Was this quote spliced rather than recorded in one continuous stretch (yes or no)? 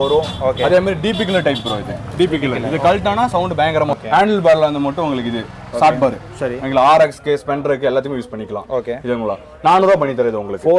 yes